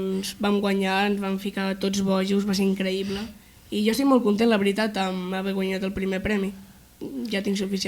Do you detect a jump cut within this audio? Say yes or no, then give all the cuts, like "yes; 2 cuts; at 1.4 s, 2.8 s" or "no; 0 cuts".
no; 0 cuts